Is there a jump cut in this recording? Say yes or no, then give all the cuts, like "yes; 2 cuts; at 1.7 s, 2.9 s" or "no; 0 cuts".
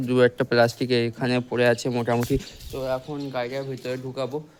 no; 0 cuts